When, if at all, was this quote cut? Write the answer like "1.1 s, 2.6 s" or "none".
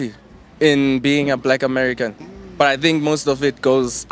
none

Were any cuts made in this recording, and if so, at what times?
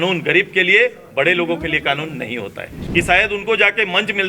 2.8 s

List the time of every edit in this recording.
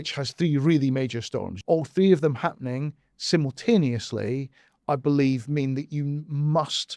1.5 s

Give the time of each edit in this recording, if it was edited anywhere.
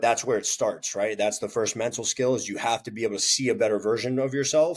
none

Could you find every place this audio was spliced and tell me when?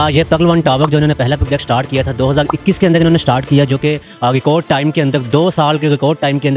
none

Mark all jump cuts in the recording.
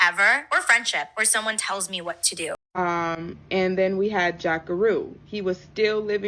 2.6 s

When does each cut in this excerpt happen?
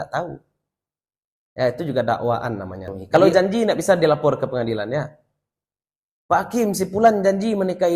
2.9 s

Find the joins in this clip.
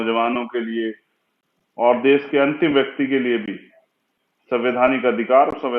none

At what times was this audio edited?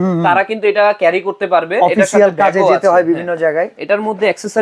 none

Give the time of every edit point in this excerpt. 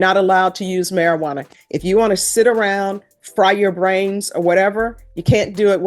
none

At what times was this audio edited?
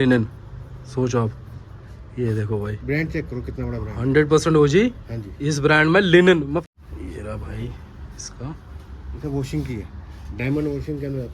6.6 s

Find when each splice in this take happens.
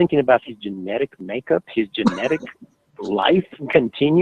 1.1 s

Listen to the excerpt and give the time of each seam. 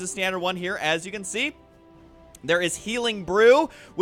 none

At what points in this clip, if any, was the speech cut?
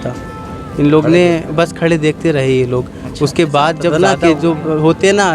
3.9 s

